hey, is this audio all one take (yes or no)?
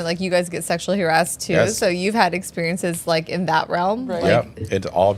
yes